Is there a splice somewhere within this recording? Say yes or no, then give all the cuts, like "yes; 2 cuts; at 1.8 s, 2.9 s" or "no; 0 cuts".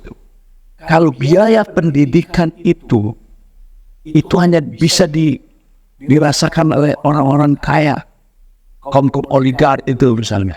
no; 0 cuts